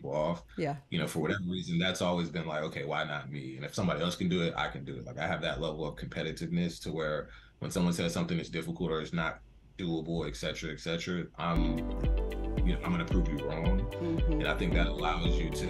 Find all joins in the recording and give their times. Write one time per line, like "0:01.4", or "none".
none